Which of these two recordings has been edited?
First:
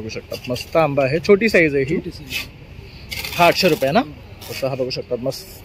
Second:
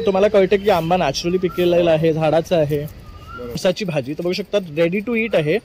second; 1 cut; at 3.6 s

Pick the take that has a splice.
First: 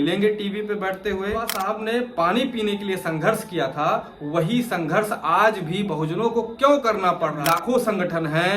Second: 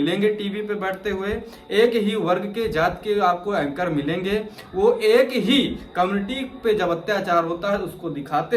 first; 2 cuts; at 1.6 s, 7.4 s

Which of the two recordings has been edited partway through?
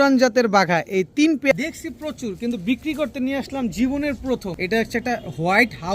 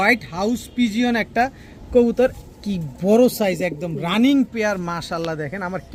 first; 2 cuts; at 1.5 s, 4.5 s

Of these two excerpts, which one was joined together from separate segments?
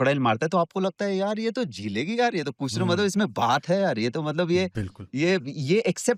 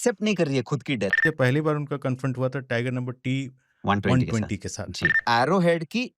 second; 2 cuts; at 1.2 s, 5.2 s

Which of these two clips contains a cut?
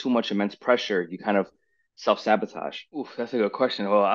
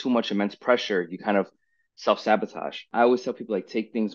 first; 1 cut; at 2.7 s

